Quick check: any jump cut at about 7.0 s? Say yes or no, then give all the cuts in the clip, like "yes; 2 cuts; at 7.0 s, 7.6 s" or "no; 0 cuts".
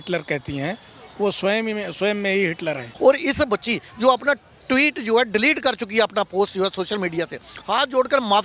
no; 1 cut; at 2.9 s